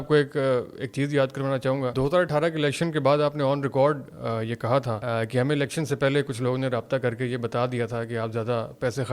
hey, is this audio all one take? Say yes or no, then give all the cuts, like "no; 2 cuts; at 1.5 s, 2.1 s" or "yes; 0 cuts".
no; 2 cuts; at 1.9 s, 5.0 s